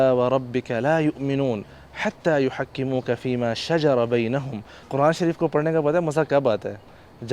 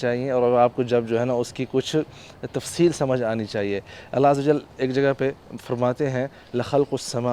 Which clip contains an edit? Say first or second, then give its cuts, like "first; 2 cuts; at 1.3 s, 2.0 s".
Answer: first; 1 cut; at 4.9 s